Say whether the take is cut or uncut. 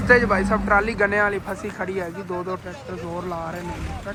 uncut